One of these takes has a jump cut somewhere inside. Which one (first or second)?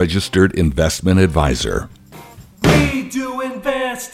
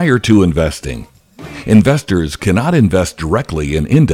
first